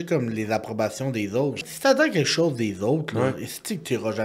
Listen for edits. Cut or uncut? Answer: cut